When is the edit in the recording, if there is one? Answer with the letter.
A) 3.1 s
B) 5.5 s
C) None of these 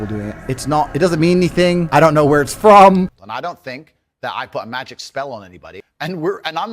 A